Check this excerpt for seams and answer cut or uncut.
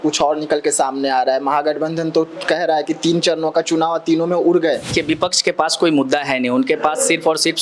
cut